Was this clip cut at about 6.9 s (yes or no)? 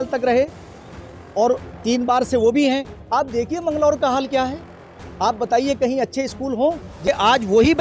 yes